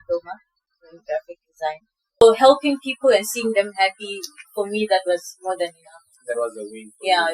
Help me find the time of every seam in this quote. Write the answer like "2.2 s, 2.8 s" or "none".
2.2 s